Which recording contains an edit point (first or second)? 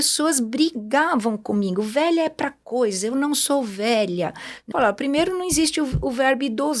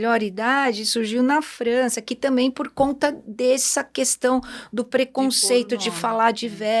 first